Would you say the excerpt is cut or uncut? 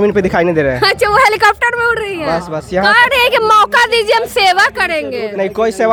uncut